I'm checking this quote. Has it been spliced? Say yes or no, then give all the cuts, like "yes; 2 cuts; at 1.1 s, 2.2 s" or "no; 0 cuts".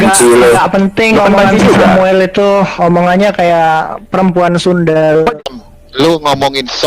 yes; 1 cut; at 5.3 s